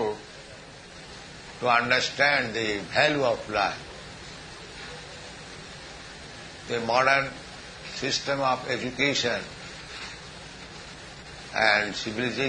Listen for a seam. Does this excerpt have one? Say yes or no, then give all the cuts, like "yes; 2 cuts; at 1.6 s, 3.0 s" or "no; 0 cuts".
no; 0 cuts